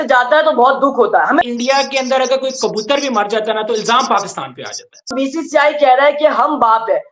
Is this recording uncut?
no; 2 cuts; at 1.4 s, 5.1 s

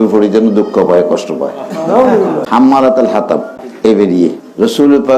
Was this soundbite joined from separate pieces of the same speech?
yes; 2 cuts; at 2.4 s, 3.6 s

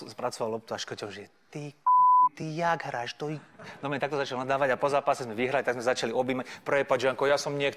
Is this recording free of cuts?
yes; 0 cuts

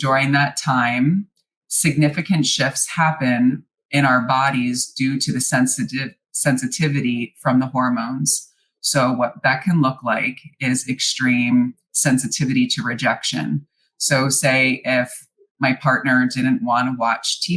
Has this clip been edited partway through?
no; 0 cuts

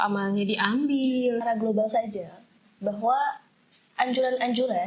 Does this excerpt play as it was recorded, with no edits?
no; 1 cut; at 1.4 s

